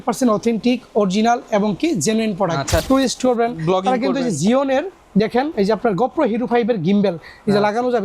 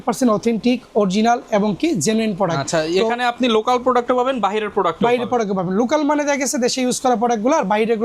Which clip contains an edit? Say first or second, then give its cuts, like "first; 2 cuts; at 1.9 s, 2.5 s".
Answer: first; 1 cut; at 2.8 s